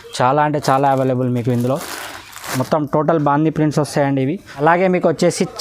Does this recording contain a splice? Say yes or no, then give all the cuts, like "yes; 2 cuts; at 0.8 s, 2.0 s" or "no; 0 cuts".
yes; 1 cut; at 4.5 s